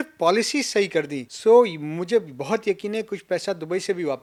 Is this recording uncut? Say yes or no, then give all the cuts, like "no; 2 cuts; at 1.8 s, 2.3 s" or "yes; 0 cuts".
yes; 0 cuts